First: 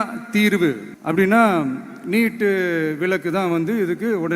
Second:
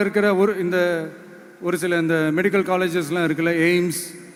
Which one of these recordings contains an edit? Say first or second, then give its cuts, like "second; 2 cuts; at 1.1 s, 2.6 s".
first; 1 cut; at 0.9 s